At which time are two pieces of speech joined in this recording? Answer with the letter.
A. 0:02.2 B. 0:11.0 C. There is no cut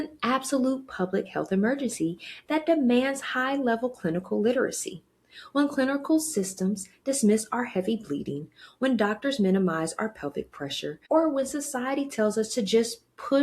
B